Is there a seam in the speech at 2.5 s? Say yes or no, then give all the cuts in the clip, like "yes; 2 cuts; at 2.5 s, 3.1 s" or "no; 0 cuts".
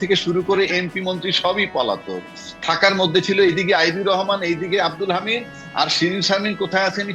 no; 0 cuts